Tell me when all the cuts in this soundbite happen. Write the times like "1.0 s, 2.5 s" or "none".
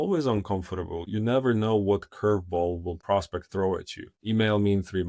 1.1 s, 2.9 s, 4.1 s